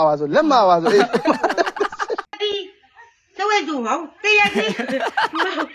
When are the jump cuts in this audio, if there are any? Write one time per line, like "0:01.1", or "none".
0:02.2